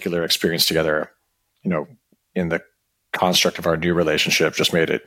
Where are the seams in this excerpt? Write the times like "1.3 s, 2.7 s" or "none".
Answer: none